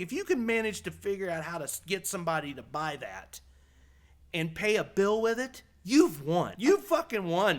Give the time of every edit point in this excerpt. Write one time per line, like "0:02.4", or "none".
0:06.5